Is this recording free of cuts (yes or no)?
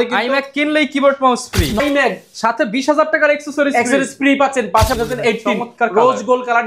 no